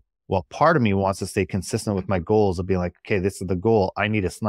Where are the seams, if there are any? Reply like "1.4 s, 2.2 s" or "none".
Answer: none